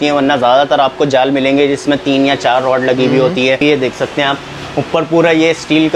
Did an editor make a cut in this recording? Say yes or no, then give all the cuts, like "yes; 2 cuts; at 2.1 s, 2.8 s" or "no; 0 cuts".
yes; 1 cut; at 3.6 s